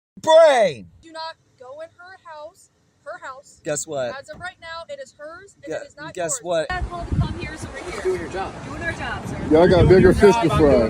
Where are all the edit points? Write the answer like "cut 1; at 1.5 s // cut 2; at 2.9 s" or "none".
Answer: cut 1; at 1.1 s // cut 2; at 6.7 s // cut 3; at 9.6 s